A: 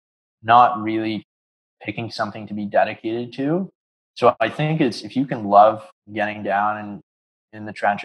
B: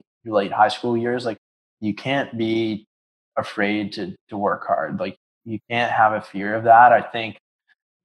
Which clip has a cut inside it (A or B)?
B